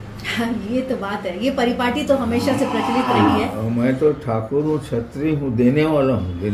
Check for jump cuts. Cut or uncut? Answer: uncut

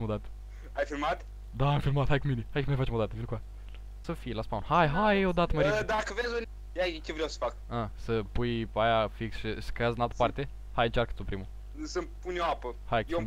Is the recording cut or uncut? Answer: cut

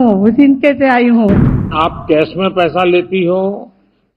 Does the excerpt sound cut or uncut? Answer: cut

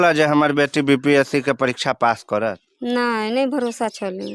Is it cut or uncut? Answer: uncut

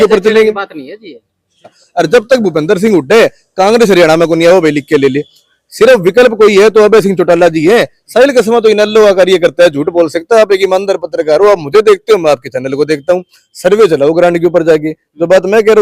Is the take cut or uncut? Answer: cut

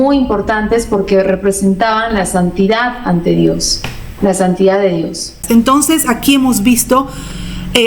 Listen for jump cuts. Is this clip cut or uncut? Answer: cut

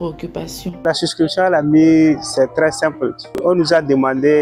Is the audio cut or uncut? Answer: cut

